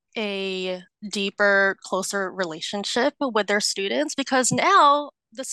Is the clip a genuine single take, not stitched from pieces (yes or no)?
no